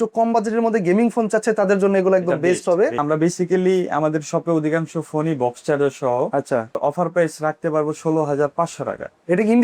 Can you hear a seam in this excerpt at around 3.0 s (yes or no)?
yes